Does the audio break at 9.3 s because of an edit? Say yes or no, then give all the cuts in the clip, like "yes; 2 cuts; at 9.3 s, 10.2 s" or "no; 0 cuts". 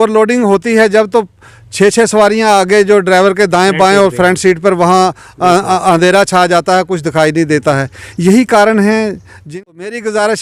yes; 1 cut; at 9.3 s